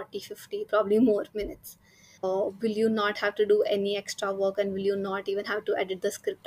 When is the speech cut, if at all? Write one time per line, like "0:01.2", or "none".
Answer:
0:02.1